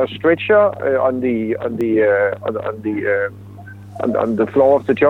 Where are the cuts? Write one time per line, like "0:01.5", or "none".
none